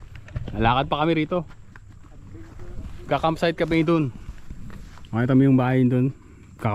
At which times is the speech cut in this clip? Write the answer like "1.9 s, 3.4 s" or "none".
none